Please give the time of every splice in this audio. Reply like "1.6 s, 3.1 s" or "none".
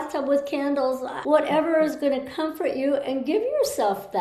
1.1 s